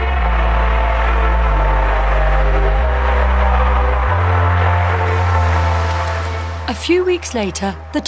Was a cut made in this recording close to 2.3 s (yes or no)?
no